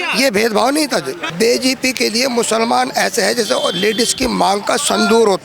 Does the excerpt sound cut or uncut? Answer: cut